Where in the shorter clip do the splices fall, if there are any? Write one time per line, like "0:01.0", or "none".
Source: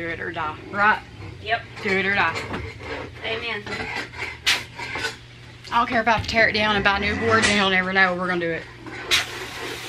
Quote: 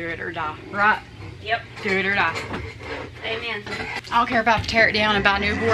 0:04.0